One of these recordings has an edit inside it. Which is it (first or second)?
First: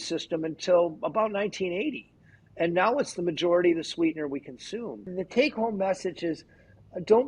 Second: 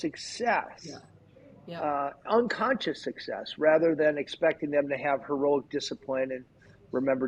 first